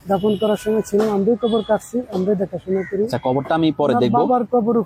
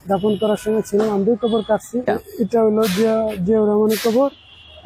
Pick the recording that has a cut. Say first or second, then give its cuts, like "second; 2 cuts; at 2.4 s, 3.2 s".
second; 1 cut; at 2.1 s